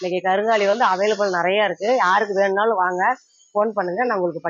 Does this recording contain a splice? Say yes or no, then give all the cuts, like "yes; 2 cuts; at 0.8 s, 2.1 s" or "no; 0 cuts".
no; 0 cuts